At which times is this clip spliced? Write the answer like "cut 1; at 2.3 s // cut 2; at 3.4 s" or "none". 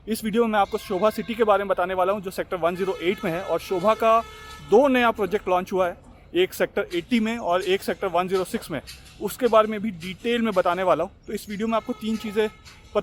none